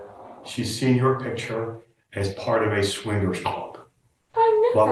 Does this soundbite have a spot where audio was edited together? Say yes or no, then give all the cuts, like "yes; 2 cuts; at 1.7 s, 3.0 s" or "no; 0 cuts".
no; 0 cuts